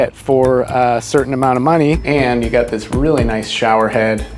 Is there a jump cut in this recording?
yes; 1 cut; at 2.0 s

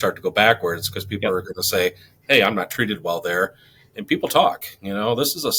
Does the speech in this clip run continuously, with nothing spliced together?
yes; 0 cuts

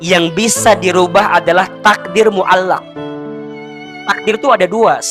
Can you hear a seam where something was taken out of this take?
no; 0 cuts

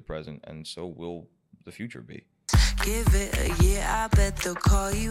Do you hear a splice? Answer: yes; 1 cut; at 2.4 s

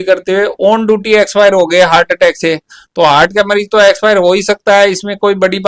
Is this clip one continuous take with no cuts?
yes; 0 cuts

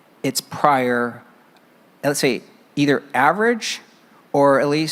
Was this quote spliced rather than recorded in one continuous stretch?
no; 0 cuts

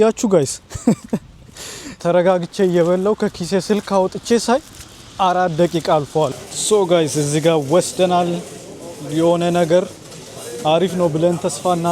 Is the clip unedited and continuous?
no; 2 cuts; at 1.9 s, 6.3 s

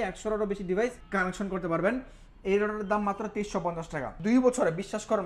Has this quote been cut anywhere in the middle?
yes; 2 cuts; at 1.0 s, 4.1 s

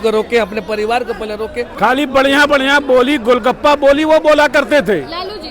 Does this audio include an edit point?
yes; 1 cut; at 1.6 s

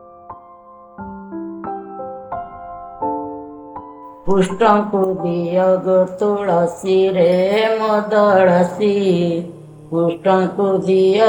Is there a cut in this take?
yes; 1 cut; at 4.0 s

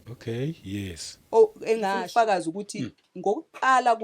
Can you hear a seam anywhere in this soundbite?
yes; 1 cut; at 2.0 s

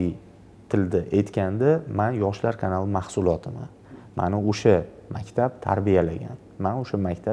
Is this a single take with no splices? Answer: yes; 0 cuts

